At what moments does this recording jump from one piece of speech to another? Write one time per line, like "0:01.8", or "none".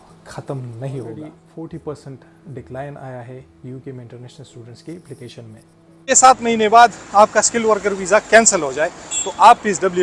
0:01.4
0:06.0